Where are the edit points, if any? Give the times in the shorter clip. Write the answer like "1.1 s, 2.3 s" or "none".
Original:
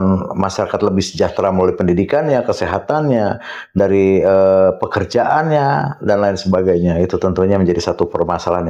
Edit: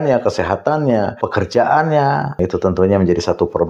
1.2 s, 2.4 s